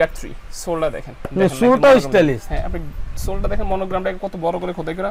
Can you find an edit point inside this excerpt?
no; 0 cuts

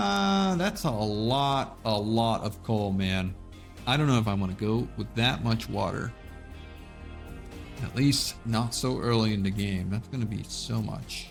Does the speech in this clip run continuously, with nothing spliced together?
yes; 0 cuts

